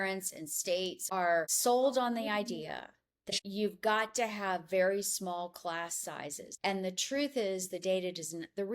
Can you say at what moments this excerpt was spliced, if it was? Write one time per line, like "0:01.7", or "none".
0:03.3